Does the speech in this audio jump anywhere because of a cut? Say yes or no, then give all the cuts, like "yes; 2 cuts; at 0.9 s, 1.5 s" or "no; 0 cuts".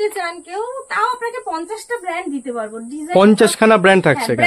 no; 0 cuts